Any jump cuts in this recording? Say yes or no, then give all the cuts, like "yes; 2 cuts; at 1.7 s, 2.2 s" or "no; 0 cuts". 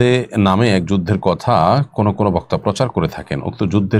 no; 0 cuts